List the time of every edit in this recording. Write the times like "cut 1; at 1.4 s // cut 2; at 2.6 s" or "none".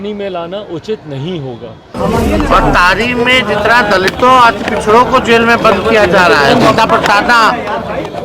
cut 1; at 1.9 s